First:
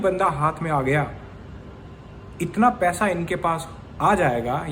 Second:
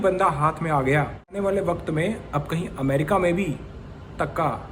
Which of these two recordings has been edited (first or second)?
second